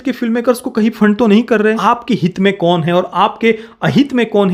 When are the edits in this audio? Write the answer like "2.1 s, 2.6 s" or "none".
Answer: none